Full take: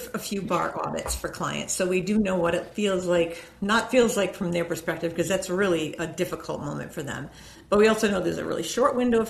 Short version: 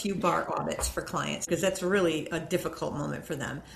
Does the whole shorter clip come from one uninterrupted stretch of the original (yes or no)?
no